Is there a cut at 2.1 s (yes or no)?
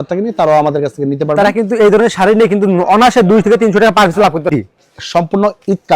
no